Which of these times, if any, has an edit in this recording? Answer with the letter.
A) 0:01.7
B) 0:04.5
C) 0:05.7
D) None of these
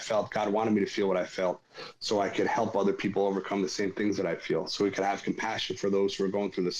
D